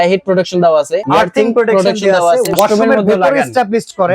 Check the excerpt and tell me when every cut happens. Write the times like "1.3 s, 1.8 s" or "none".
1.0 s, 2.5 s